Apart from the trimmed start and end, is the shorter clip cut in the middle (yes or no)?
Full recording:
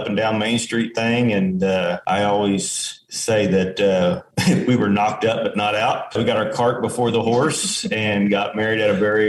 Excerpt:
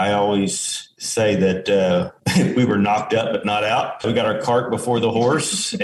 no